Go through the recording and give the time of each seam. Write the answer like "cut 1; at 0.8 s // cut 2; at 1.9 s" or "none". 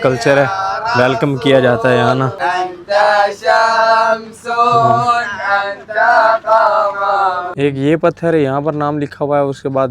cut 1; at 2.4 s // cut 2; at 7.5 s